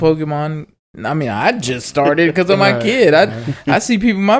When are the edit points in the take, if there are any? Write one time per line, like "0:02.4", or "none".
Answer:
none